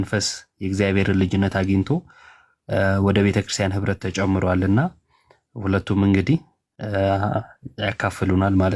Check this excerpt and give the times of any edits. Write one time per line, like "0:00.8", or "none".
none